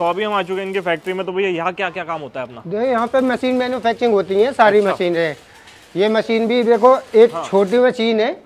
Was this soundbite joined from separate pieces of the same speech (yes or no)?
no